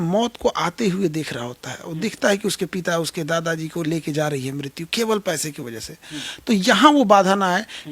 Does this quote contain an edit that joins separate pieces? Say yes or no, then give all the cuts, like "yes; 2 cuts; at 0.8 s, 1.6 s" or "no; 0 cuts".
no; 0 cuts